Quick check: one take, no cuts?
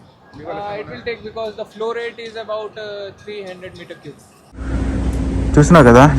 no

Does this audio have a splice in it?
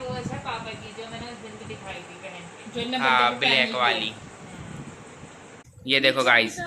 yes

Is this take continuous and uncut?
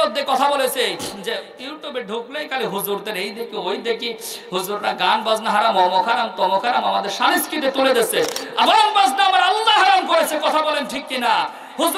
yes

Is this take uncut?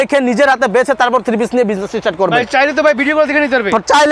yes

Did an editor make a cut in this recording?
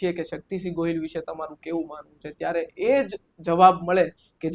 no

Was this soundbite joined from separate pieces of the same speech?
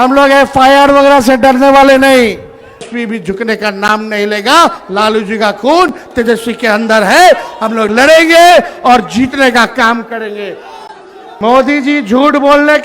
yes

